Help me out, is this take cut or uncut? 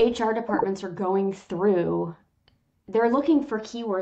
uncut